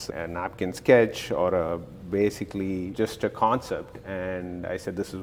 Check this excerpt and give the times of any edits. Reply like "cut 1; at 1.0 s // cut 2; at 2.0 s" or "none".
none